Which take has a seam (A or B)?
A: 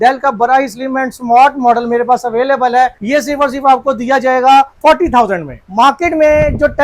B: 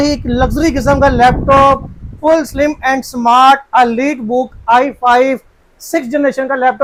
A